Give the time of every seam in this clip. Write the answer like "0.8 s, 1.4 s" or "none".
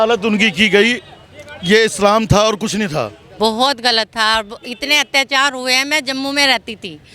3.2 s